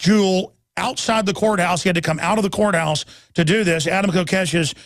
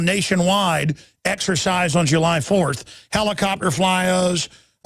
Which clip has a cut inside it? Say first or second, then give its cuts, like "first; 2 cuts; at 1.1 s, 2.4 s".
second; 1 cut; at 1.6 s